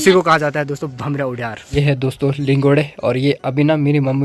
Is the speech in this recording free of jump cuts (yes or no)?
no